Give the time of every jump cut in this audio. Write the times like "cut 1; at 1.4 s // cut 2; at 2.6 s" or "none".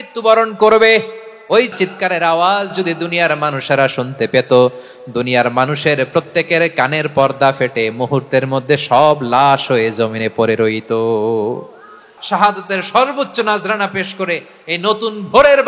cut 1; at 1.7 s // cut 2; at 12.1 s